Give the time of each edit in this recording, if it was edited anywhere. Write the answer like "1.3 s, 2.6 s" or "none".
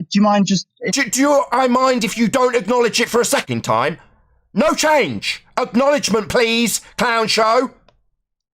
3.4 s